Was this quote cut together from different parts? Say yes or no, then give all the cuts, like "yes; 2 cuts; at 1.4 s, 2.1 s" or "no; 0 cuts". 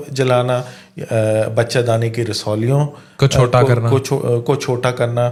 no; 0 cuts